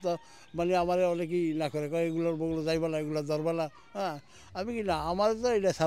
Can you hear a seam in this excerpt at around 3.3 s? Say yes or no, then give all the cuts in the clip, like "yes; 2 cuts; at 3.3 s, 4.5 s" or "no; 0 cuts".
no; 0 cuts